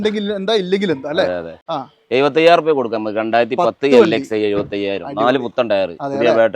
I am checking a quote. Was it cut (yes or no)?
yes